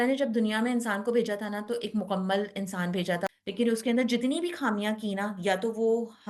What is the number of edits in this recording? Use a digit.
1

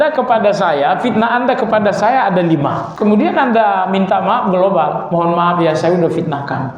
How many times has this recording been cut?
1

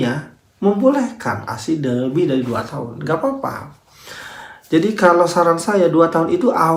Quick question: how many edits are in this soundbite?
0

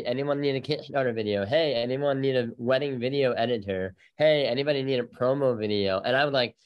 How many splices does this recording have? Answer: 0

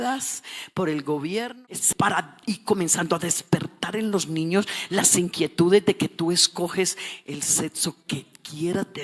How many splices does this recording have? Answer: 1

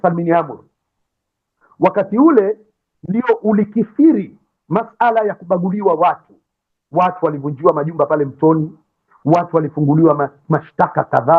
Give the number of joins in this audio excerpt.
0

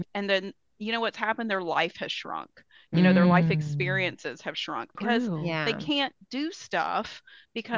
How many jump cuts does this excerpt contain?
1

